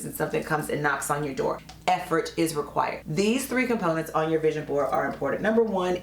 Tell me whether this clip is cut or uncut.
cut